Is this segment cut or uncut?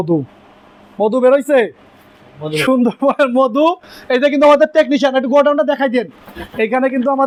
uncut